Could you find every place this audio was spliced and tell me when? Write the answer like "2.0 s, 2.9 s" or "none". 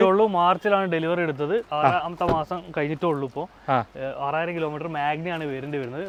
none